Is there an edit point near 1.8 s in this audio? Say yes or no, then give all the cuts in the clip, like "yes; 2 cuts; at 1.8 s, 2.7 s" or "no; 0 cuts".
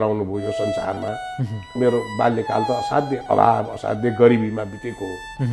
yes; 1 cut; at 1.8 s